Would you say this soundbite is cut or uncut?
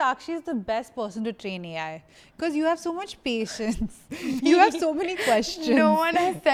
uncut